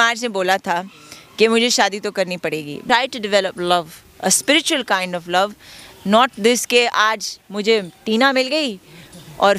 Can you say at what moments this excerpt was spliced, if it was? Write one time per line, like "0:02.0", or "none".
0:02.8